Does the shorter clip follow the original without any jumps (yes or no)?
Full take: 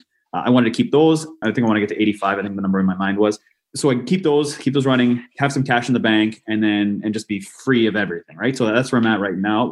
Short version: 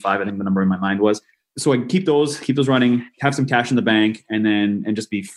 yes